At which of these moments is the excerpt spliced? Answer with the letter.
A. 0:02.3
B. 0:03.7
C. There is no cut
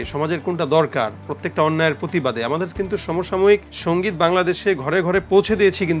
B